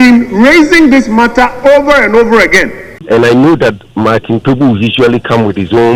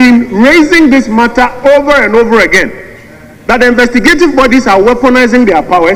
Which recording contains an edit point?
first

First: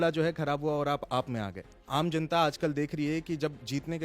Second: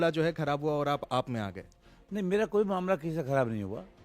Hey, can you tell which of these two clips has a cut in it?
first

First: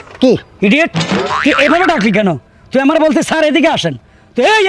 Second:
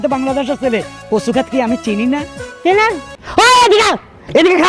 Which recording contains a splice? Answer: second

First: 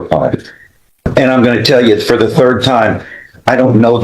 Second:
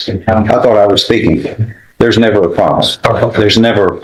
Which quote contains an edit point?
first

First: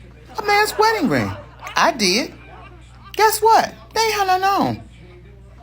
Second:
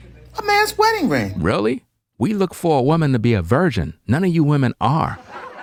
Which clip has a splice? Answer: first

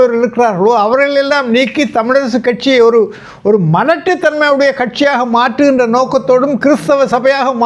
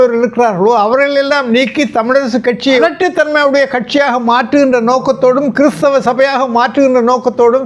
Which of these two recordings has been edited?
second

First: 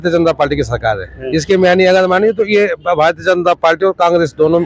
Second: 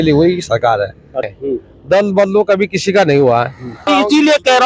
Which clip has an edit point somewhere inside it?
second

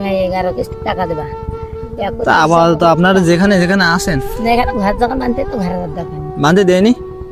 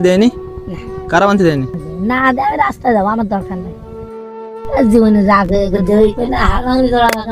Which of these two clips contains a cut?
second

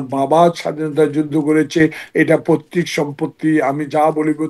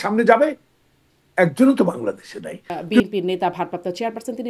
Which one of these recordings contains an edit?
second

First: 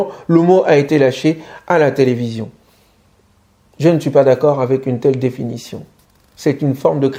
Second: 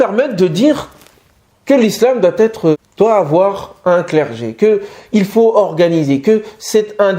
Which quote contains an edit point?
second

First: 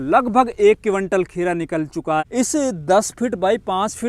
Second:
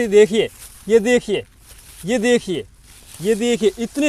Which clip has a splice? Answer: first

